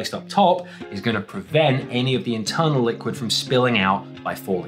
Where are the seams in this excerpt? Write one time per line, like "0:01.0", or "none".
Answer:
none